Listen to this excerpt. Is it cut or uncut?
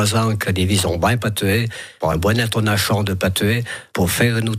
uncut